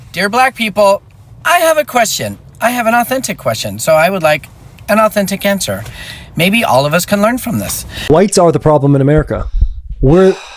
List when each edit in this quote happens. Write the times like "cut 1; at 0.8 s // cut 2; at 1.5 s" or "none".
cut 1; at 7.9 s